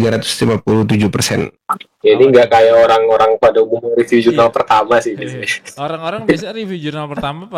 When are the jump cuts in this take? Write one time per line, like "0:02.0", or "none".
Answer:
0:01.6

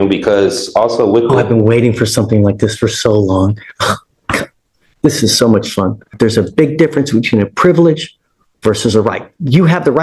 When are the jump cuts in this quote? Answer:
0:06.1

